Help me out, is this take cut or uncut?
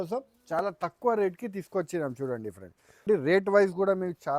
cut